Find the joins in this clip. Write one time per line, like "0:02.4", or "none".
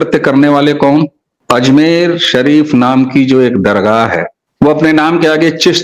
0:01.3
0:04.4